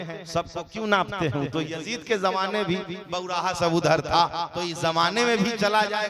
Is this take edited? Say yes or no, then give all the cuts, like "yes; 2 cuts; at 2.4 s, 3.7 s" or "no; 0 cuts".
no; 0 cuts